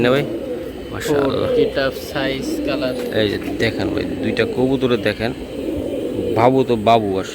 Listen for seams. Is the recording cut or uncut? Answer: uncut